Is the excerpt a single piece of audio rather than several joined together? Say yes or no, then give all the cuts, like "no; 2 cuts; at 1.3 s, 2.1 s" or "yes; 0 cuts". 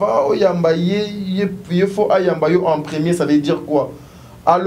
yes; 0 cuts